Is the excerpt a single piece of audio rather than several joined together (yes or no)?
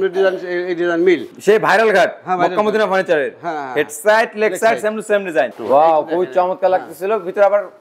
no